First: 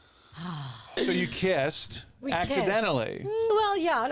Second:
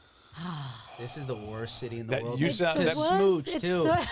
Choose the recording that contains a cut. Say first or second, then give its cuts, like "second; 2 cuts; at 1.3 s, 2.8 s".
first; 1 cut; at 1.0 s